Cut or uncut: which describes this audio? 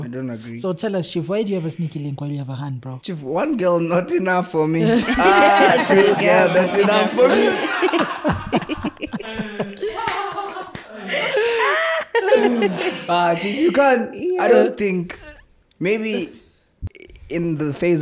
uncut